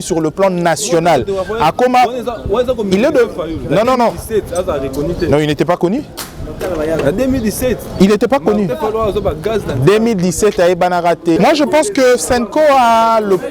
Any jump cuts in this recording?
yes; 1 cut; at 11.4 s

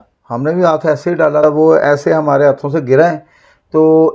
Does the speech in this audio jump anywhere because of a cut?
yes; 1 cut; at 1.4 s

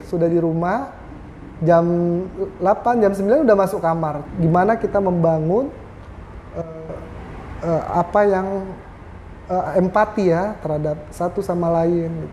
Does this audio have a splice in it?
yes; 1 cut; at 4.2 s

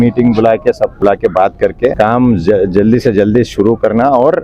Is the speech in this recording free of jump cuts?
no; 2 cuts; at 0.9 s, 1.9 s

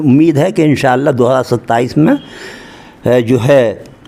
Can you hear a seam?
no; 0 cuts

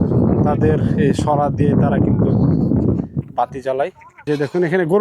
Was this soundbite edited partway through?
yes; 1 cut; at 4.1 s

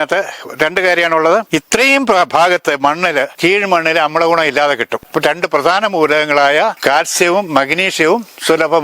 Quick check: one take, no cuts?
no; 4 cuts; at 1.5 s, 3.3 s, 5.1 s, 6.8 s

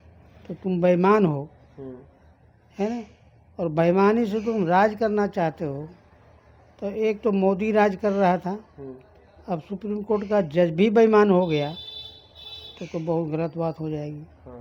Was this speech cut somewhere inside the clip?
no; 0 cuts

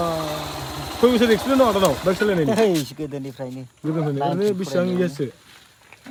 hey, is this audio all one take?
yes; 0 cuts

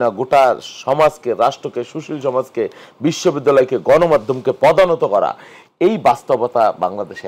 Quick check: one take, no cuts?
yes; 0 cuts

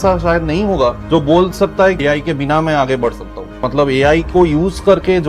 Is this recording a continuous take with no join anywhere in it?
no; 3 cuts; at 1.0 s, 2.0 s, 3.6 s

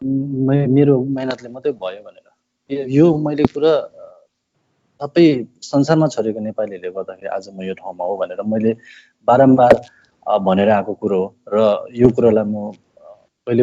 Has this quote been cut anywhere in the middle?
no; 0 cuts

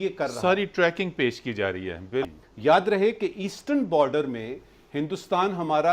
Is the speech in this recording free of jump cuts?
no; 1 cut; at 2.3 s

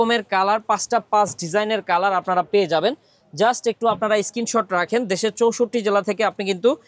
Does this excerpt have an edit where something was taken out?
no; 0 cuts

